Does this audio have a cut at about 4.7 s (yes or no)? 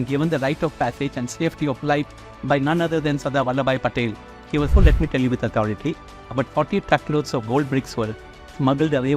yes